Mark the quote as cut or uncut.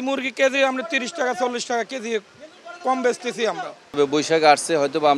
cut